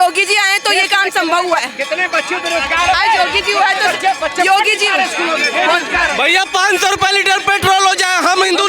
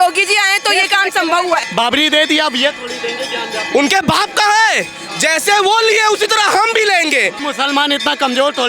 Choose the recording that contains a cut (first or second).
second